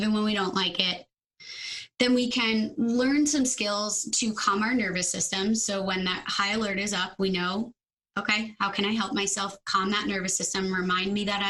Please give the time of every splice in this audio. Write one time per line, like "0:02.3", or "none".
none